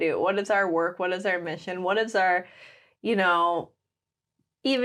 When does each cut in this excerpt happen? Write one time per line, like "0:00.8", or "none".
none